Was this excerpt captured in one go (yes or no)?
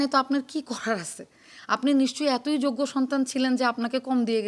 yes